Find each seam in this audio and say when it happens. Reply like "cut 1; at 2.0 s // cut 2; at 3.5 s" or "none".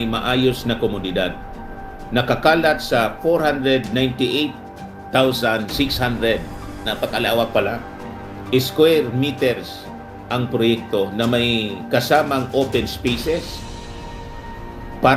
none